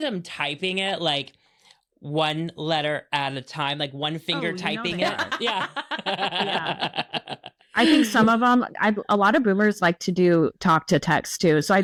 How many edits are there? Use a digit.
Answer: 0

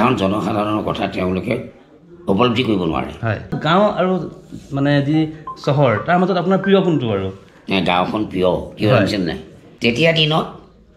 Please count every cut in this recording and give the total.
2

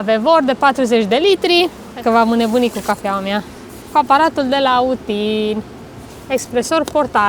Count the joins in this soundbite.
1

